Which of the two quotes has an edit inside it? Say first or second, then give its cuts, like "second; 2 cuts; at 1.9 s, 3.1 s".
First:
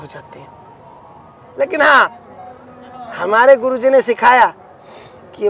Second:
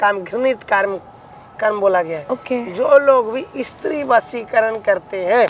first; 1 cut; at 1.4 s